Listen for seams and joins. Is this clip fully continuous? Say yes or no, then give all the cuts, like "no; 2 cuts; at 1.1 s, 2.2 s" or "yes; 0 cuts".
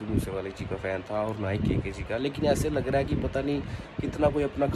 yes; 0 cuts